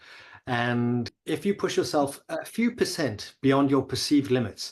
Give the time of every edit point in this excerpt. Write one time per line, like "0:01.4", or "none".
0:01.2